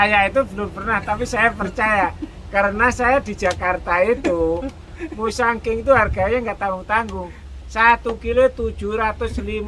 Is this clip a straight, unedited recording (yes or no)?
yes